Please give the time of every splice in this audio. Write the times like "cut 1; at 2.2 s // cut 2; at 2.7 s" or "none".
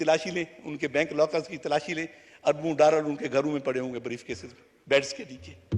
none